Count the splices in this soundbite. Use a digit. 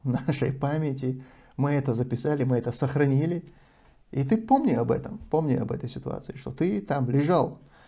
0